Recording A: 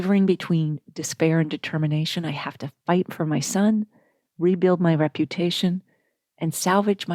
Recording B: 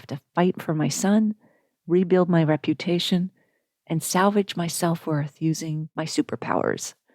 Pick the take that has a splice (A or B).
B